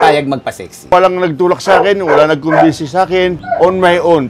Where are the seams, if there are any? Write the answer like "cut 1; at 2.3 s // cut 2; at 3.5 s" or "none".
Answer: cut 1; at 0.9 s